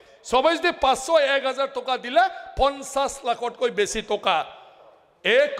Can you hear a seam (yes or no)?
no